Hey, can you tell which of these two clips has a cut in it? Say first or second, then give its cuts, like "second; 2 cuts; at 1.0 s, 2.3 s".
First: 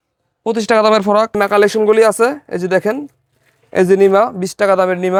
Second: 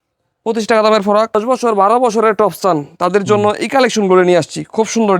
second; 1 cut; at 1.4 s